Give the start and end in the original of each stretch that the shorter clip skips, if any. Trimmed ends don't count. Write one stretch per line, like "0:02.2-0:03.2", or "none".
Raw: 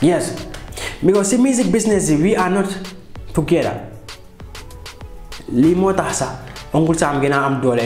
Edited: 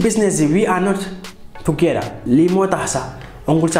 0:03.8-0:05.4